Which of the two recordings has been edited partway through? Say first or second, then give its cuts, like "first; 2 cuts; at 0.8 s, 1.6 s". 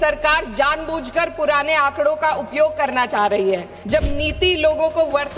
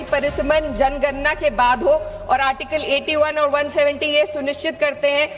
first; 1 cut; at 3.7 s